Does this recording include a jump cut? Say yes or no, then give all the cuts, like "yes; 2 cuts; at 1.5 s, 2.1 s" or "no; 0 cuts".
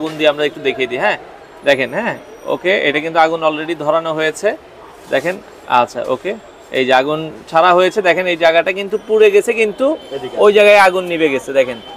no; 0 cuts